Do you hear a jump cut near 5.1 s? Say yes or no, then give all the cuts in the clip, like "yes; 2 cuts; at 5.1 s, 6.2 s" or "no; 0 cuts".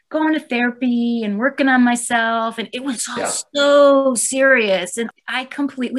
yes; 1 cut; at 5.1 s